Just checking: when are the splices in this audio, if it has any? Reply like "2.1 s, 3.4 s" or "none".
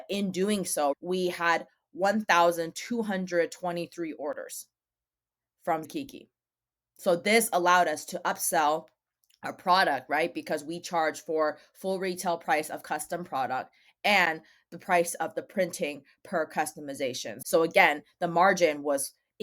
1.0 s, 17.3 s